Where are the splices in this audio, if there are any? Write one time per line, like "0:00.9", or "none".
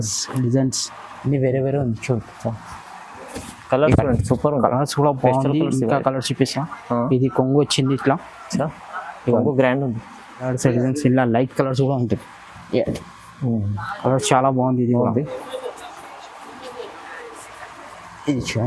0:02.7
0:10.4